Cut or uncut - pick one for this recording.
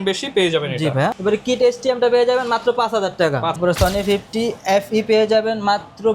cut